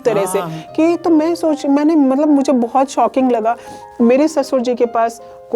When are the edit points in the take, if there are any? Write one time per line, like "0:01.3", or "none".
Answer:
0:03.8